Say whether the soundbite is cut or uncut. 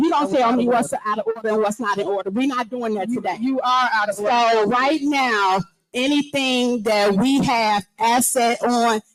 uncut